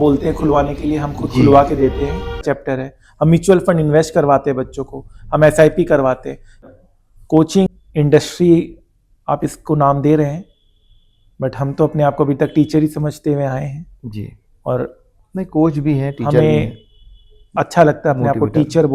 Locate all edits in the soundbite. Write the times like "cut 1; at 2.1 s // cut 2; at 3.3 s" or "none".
cut 1; at 2.4 s // cut 2; at 6.7 s // cut 3; at 7.7 s